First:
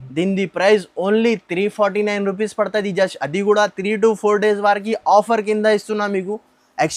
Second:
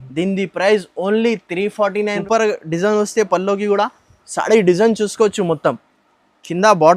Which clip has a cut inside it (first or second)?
second